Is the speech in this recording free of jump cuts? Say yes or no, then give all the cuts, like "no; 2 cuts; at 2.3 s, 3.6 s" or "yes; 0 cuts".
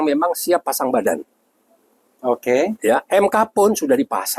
yes; 0 cuts